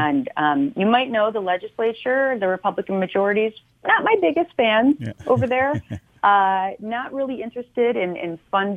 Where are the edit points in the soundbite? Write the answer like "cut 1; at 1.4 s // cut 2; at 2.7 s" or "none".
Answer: cut 1; at 3.7 s